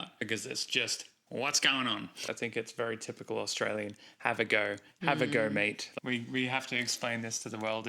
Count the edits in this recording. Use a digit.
2